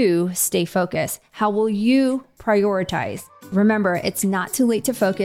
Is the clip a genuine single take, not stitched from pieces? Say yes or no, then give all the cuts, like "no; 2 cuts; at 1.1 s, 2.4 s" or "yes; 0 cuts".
no; 1 cut; at 3.4 s